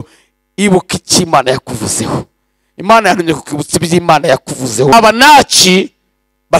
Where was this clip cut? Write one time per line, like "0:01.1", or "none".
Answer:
0:04.9